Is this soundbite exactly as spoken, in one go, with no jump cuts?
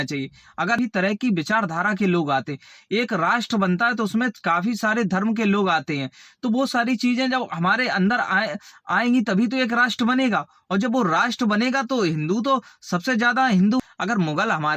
no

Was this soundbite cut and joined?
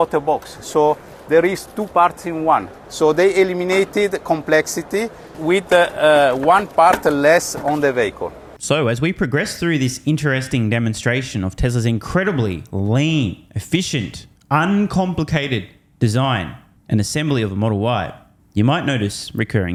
no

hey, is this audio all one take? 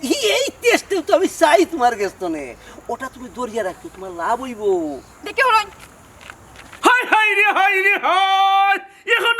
no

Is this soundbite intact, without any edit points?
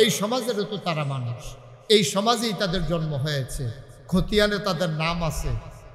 yes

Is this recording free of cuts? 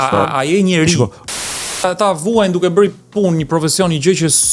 no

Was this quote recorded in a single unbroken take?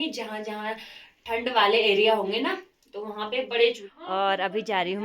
no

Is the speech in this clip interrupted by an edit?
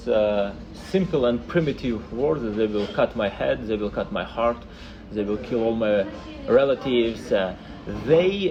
no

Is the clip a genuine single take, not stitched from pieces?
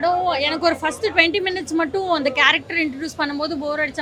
yes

